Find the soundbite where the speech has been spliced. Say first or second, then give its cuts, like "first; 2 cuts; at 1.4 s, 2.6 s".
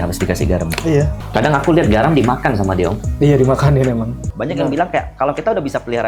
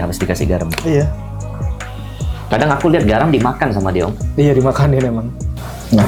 first; 2 cuts; at 1.2 s, 4.3 s